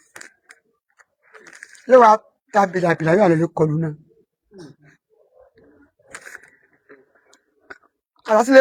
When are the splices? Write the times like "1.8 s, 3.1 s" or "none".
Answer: none